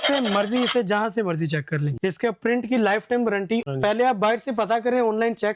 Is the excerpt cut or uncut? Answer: cut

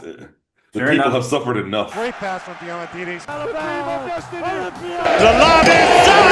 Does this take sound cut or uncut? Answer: cut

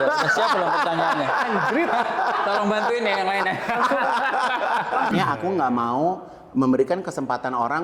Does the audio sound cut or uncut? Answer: cut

